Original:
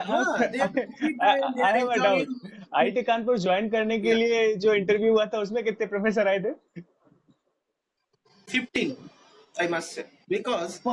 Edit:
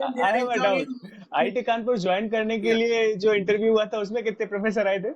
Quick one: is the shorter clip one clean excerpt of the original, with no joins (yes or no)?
yes